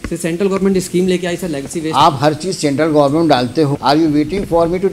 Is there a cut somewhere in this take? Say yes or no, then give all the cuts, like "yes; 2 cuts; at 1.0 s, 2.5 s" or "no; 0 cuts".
yes; 1 cut; at 3.8 s